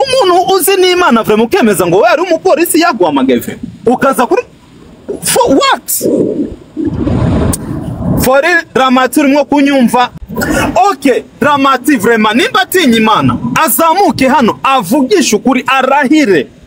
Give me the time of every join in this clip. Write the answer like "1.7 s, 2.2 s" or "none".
10.1 s

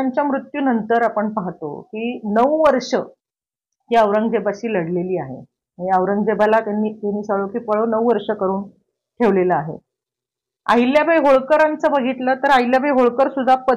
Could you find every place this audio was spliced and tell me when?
none

